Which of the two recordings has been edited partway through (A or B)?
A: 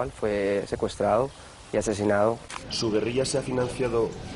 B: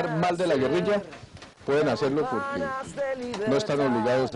A